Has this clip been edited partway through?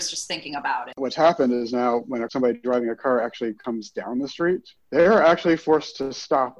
yes; 4 cuts; at 1.0 s, 2.3 s, 3.6 s, 4.8 s

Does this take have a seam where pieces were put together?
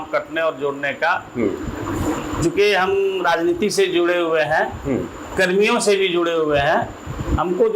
no; 0 cuts

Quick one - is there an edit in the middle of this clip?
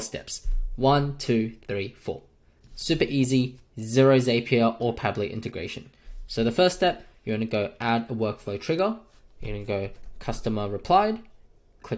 no; 0 cuts

